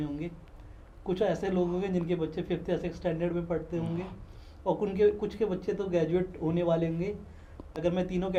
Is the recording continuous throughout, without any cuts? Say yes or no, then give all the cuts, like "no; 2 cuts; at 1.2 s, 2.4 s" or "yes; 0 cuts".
yes; 0 cuts